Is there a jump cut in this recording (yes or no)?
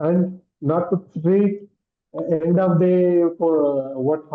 no